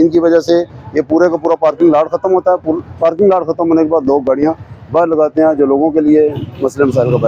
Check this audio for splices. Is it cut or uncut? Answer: uncut